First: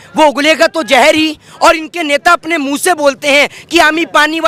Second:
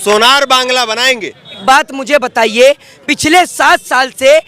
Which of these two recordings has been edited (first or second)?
second